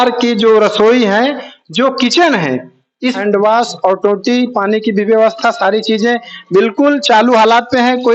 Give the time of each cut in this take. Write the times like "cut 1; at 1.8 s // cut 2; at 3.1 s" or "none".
cut 1; at 3.2 s